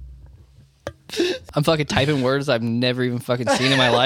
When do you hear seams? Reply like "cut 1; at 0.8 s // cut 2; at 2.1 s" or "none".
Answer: cut 1; at 1.4 s